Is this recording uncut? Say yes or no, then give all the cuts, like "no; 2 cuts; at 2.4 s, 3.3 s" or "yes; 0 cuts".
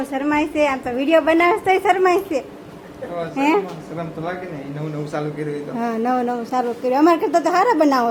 yes; 0 cuts